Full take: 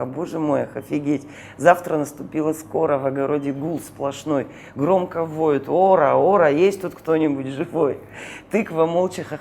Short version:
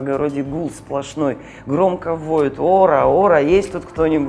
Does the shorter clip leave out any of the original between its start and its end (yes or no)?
no